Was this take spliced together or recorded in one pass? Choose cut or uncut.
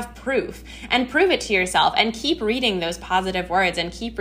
uncut